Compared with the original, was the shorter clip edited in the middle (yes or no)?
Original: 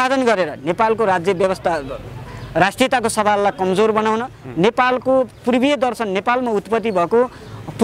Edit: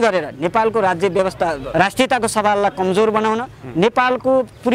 yes